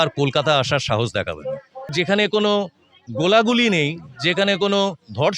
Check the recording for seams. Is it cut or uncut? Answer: cut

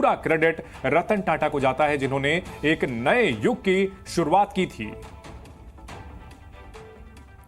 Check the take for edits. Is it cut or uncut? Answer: cut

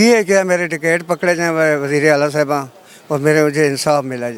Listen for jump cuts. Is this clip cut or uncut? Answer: uncut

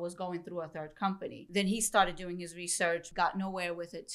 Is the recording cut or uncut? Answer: cut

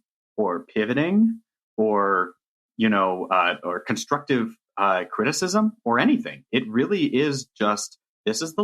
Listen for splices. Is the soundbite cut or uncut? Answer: uncut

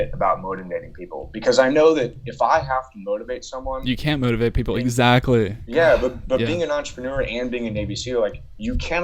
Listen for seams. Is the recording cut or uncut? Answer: uncut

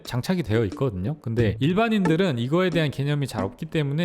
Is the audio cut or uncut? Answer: uncut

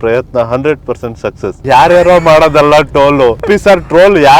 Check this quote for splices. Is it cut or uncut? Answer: cut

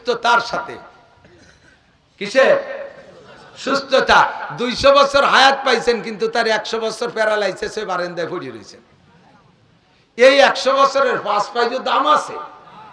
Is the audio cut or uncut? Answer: uncut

